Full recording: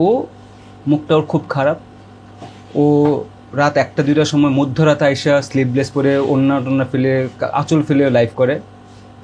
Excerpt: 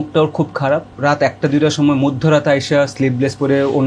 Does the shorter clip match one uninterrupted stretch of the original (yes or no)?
no